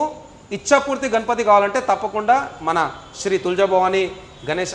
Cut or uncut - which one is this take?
uncut